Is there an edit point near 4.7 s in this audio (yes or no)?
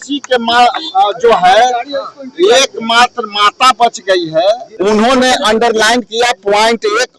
yes